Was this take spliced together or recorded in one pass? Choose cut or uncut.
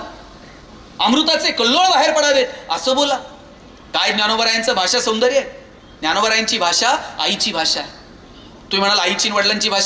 uncut